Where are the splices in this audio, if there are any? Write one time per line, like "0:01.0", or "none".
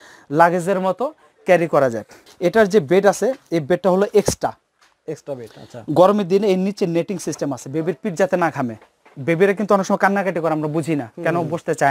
0:02.2

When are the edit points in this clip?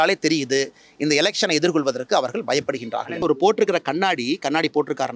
0:03.2

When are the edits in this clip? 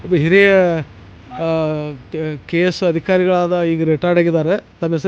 none

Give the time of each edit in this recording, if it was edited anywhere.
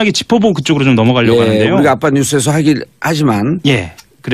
0:01.0

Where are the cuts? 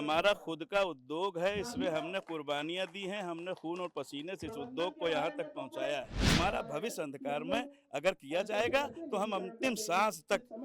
0:06.3

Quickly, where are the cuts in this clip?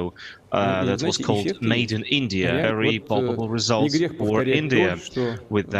0:02.7

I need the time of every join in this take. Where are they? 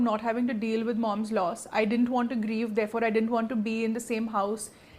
none

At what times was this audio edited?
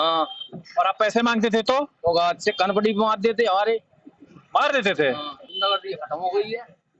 0:05.5

